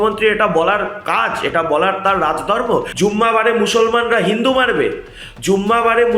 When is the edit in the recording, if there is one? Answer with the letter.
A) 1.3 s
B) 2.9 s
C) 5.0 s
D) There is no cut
B